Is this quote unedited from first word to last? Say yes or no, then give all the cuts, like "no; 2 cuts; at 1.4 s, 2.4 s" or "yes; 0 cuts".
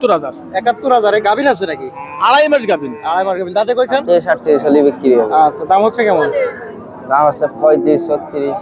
no; 1 cut; at 4.0 s